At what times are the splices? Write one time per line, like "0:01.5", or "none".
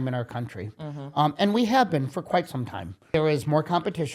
0:03.1